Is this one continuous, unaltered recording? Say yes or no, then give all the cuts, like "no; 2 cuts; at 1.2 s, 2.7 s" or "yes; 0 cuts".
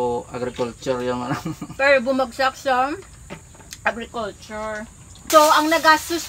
no; 1 cut; at 5.1 s